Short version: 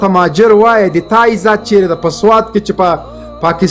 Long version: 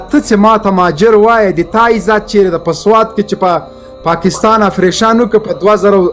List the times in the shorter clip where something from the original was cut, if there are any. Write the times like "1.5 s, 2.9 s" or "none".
none

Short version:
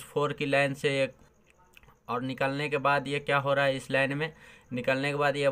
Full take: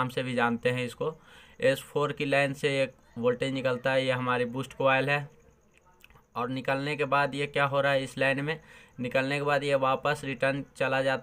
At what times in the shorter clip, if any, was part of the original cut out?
1.2 s

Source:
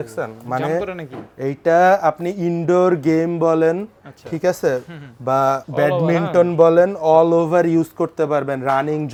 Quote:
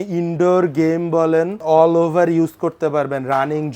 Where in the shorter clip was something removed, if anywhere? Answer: 1.6 s

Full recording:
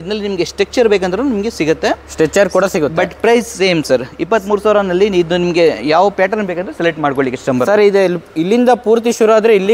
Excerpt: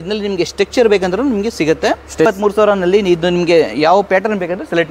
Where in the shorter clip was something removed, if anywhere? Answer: 2.3 s

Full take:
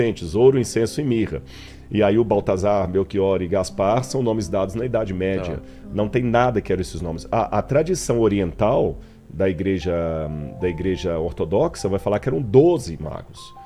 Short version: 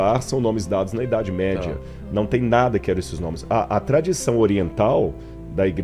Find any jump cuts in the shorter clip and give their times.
none

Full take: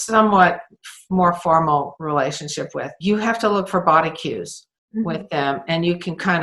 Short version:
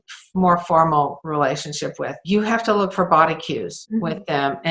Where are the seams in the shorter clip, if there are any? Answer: 3.8 s

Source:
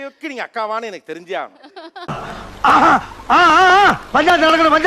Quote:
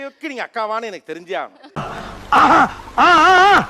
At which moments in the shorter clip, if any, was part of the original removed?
1.6 s

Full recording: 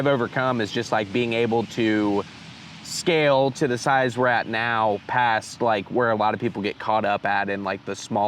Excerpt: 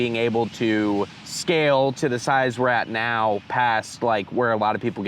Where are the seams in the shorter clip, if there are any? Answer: 1.2 s

